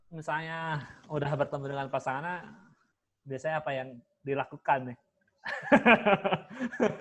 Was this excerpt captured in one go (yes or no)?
yes